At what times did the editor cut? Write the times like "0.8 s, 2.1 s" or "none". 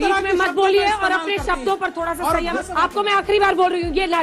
2.5 s